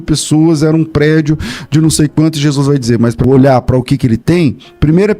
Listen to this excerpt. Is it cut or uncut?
cut